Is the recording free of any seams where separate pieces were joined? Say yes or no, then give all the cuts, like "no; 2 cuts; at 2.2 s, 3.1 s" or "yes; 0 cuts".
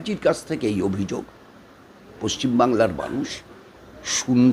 yes; 0 cuts